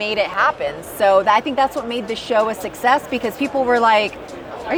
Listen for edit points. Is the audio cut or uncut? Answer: uncut